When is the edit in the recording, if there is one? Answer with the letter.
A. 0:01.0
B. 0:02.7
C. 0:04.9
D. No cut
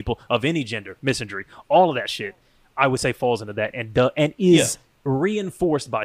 C